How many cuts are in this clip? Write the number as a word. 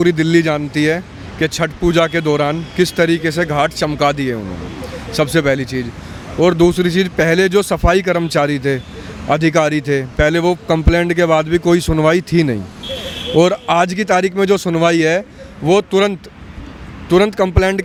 zero